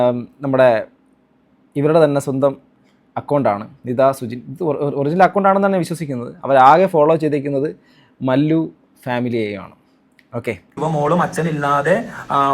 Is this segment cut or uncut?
cut